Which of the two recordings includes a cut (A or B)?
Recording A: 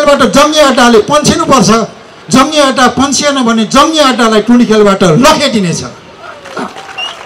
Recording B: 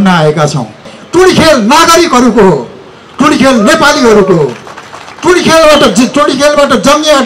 B